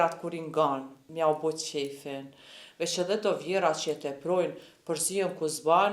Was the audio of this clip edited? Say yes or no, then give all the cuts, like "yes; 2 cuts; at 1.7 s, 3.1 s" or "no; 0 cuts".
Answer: yes; 1 cut; at 1.0 s